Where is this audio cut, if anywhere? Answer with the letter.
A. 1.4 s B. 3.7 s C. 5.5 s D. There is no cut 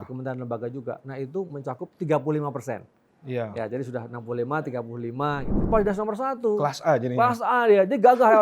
C